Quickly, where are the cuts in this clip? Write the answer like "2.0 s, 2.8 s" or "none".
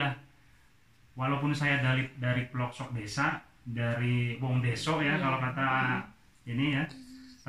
none